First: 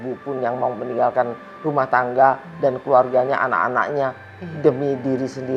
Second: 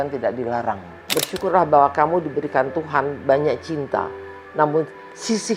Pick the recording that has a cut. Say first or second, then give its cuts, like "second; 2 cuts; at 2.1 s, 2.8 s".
second; 1 cut; at 1.2 s